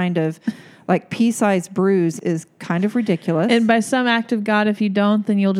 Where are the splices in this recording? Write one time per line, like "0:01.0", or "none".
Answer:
0:02.2